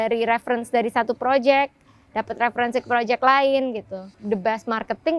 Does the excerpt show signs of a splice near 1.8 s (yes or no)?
no